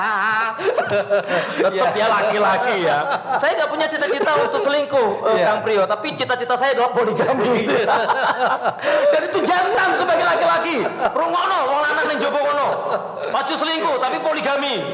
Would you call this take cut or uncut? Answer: uncut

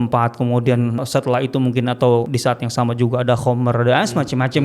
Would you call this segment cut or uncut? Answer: cut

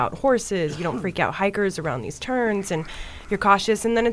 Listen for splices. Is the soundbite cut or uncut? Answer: uncut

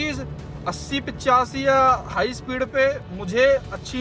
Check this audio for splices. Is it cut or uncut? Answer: uncut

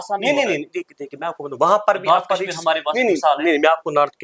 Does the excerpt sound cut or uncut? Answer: uncut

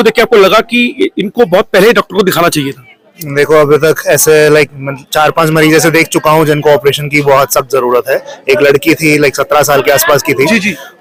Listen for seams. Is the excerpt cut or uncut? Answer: uncut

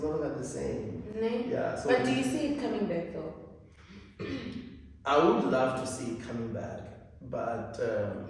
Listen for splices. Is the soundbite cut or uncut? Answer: uncut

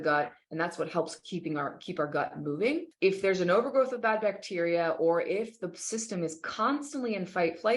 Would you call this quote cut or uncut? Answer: cut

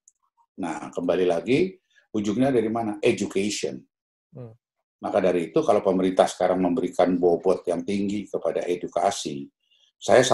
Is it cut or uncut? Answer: uncut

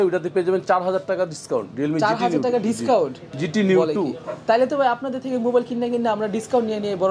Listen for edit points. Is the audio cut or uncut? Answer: uncut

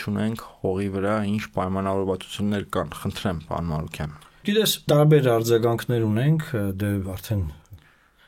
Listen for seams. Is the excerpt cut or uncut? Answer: uncut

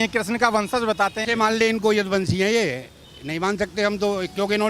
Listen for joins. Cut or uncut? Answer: cut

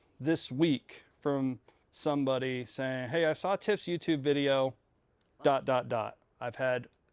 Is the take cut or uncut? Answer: uncut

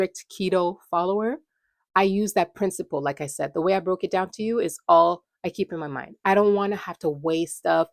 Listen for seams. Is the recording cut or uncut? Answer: uncut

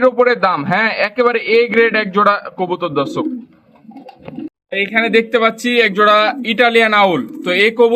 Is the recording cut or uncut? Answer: uncut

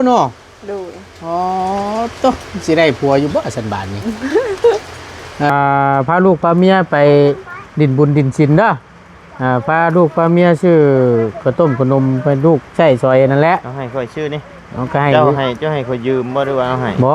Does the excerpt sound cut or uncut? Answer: cut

